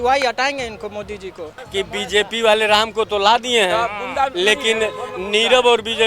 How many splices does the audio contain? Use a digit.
1